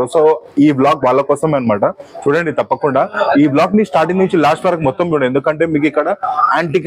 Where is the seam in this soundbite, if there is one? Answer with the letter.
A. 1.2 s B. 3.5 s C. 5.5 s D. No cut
D